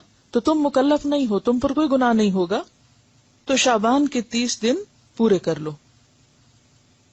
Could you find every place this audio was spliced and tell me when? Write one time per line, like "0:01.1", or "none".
none